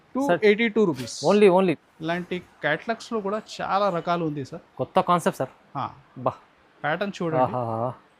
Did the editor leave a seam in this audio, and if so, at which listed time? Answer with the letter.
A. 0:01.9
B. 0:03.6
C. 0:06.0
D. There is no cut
A